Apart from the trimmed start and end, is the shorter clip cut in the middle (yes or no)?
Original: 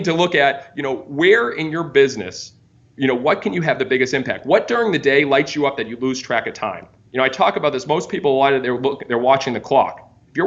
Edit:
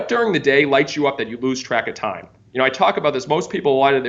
no